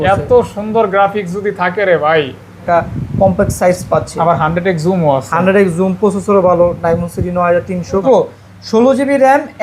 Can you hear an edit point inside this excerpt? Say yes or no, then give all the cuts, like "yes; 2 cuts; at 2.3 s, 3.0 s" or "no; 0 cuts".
yes; 2 cuts; at 2.6 s, 8.0 s